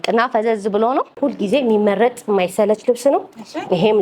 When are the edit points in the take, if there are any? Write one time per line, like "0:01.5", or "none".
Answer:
0:01.2